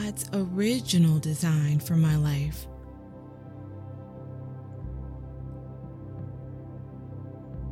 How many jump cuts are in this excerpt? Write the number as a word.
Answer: three